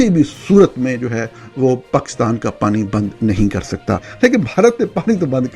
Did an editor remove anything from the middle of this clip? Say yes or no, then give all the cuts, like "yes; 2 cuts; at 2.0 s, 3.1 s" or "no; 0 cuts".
yes; 1 cut; at 4.1 s